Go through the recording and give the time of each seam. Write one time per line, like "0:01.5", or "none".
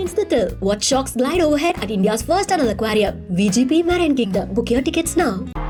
none

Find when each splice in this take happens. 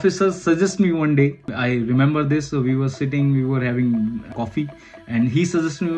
0:01.5
0:04.3

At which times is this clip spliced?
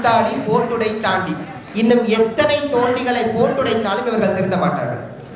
none

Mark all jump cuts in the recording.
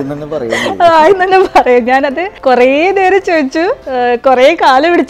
0:02.3
0:03.8

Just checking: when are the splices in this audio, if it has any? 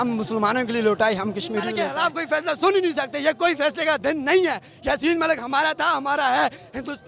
0:01.8

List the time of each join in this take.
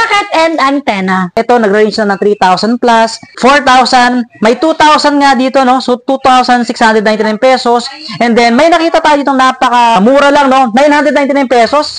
0:01.3
0:03.3
0:10.0

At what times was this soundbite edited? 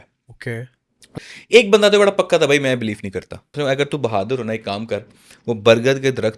0:01.2
0:03.5

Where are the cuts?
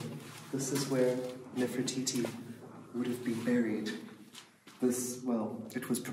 none

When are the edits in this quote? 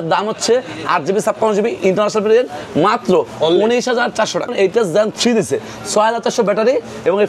0:04.5

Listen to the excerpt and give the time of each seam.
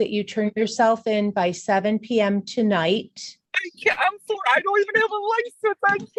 none

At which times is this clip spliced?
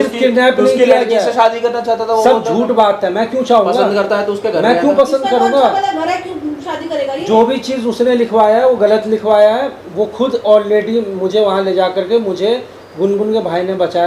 none

